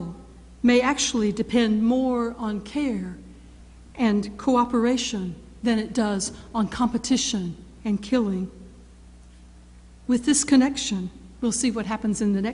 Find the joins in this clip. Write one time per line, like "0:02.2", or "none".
0:07.7